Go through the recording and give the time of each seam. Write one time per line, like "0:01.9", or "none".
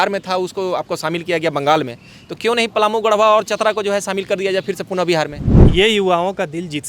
0:05.4

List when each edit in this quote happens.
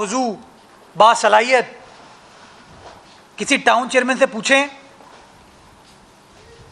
none

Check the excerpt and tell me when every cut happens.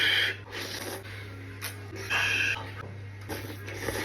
0:00.8
0:02.1

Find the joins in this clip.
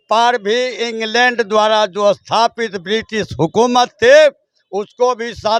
none

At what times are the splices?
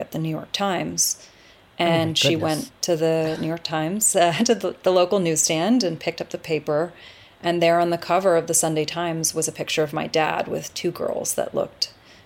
none

